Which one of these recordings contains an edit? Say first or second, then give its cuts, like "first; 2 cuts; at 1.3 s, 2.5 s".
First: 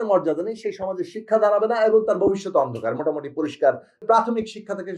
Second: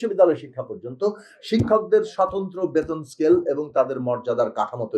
first; 1 cut; at 4.0 s